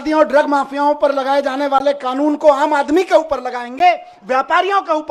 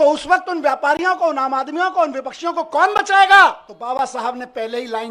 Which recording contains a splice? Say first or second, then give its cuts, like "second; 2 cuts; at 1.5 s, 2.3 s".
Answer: second; 1 cut; at 3.7 s